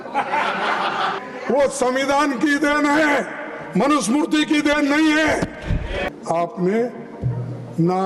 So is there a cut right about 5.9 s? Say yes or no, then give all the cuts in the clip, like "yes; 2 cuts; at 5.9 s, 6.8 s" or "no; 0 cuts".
yes; 2 cuts; at 1.2 s, 5.9 s